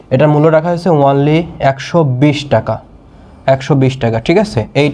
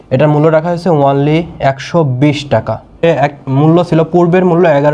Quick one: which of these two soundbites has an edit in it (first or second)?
second